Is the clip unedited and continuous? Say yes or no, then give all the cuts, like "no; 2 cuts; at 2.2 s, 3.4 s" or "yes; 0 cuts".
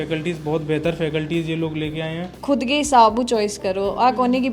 no; 1 cut; at 2.3 s